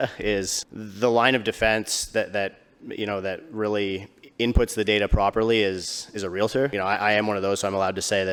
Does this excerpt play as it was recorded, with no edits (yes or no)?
yes